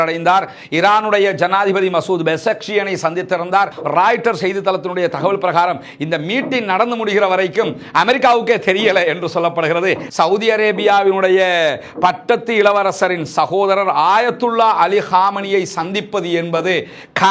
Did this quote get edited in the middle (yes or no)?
yes